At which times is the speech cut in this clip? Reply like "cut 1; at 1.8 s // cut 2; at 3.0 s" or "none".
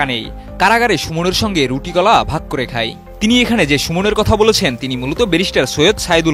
none